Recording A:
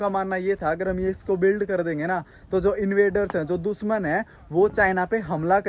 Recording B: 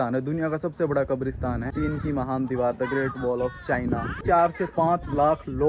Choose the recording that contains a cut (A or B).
B